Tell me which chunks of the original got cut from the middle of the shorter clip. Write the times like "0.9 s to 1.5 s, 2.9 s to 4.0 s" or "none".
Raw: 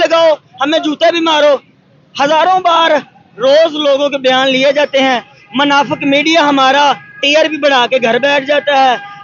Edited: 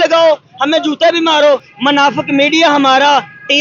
1.7 s to 5.4 s